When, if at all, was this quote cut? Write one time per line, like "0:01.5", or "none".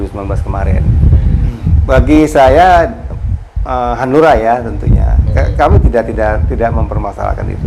0:01.4